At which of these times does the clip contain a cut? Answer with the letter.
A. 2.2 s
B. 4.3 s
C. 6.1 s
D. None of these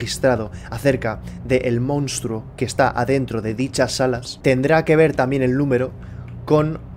B